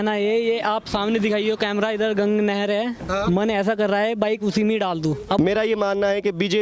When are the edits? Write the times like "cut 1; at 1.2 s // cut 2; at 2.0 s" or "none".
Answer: cut 1; at 5.4 s